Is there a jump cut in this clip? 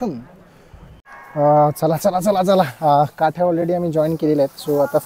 yes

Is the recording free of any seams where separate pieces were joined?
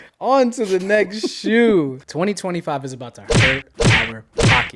no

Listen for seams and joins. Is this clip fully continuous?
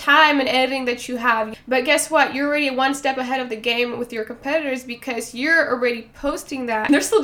yes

